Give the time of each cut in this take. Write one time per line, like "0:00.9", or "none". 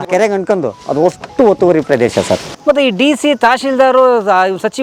none